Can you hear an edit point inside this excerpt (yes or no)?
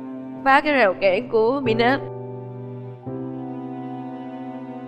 no